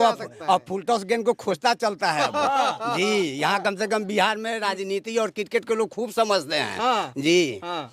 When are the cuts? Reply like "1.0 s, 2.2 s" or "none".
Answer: none